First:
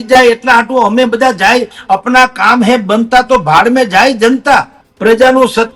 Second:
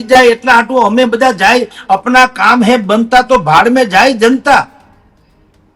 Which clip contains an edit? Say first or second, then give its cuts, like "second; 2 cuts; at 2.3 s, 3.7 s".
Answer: first; 1 cut; at 4.8 s